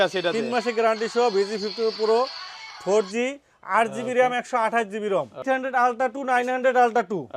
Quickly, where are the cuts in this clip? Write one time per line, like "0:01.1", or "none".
0:05.5